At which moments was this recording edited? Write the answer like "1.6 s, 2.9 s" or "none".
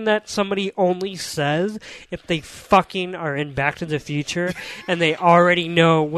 none